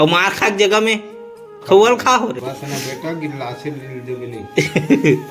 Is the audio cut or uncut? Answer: cut